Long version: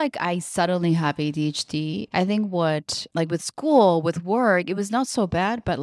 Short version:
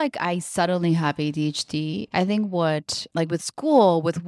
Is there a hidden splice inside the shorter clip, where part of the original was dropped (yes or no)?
no